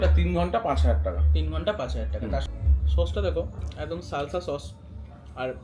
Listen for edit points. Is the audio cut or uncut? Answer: cut